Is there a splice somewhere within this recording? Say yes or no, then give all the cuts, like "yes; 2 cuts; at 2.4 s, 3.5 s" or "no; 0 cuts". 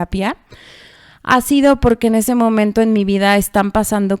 yes; 1 cut; at 2.5 s